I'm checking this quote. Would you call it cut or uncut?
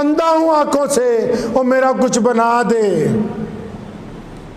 uncut